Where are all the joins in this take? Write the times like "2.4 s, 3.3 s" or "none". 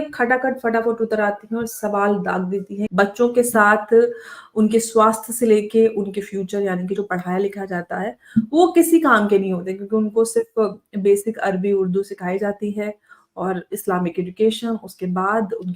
2.9 s

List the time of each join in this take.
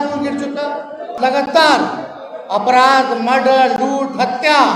1.1 s

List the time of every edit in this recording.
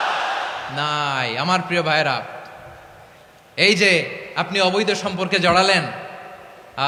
none

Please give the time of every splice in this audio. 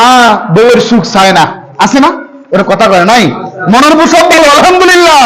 none

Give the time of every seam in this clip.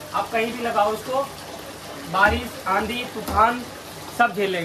none

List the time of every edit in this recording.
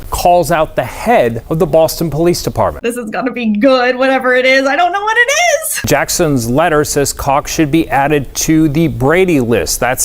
1.4 s, 2.8 s, 5.9 s

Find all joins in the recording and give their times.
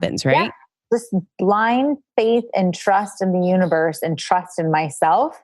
1.3 s

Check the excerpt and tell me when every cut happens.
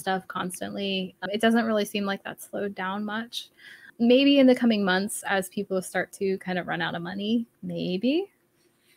1.2 s, 3.9 s

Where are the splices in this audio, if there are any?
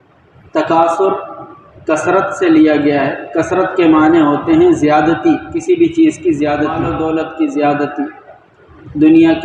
6.9 s

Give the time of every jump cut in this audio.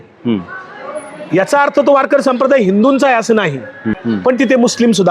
4.0 s

